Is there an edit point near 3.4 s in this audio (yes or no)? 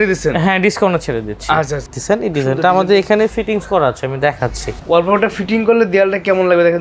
no